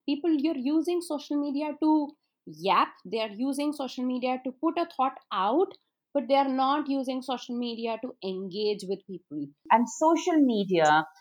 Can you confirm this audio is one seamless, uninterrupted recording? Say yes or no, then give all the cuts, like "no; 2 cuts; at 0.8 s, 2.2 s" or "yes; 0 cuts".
no; 1 cut; at 9.6 s